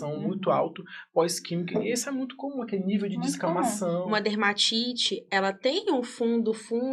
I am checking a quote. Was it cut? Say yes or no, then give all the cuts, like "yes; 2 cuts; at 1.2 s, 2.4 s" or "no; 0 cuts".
yes; 1 cut; at 4.0 s